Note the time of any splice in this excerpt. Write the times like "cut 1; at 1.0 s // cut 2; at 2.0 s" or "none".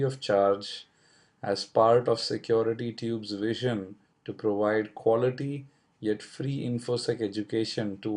cut 1; at 5.3 s

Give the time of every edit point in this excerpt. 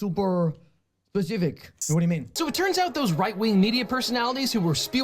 cut 1; at 2.0 s

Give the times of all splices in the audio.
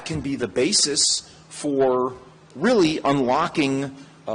none

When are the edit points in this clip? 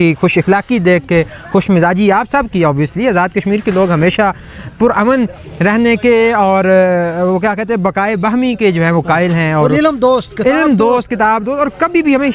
none

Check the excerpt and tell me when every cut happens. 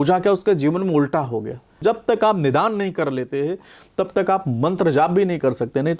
cut 1; at 1.8 s

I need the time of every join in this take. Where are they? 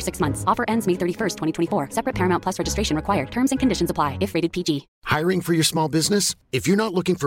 cut 1; at 4.9 s

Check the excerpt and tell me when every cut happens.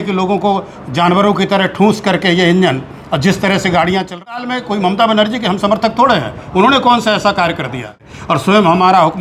cut 1; at 4.3 s // cut 2; at 8.3 s

